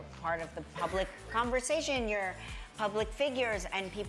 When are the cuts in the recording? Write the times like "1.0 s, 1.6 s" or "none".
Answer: none